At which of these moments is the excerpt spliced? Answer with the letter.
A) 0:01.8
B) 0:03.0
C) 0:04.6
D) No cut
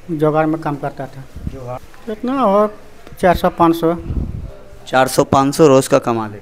A